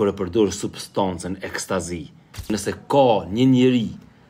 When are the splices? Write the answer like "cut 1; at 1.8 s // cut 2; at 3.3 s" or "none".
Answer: cut 1; at 2.5 s